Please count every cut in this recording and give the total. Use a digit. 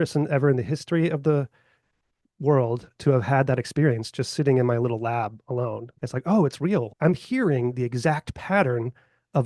2